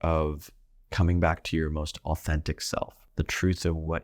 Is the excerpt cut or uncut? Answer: cut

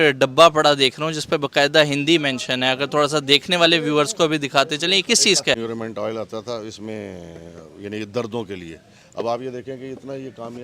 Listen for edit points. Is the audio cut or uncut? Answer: cut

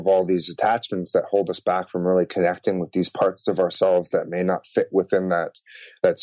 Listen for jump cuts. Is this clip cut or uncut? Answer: uncut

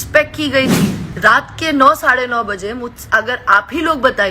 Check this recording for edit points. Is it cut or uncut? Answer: cut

